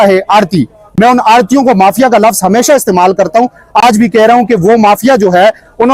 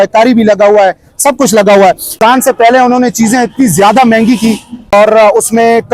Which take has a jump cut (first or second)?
second